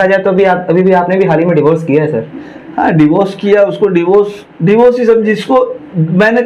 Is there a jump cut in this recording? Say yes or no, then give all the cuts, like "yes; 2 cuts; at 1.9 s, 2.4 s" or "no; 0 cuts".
no; 0 cuts